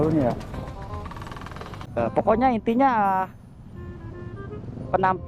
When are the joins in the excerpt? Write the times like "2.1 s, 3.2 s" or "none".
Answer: 1.9 s